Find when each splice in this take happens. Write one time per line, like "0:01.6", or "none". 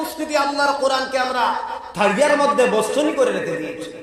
none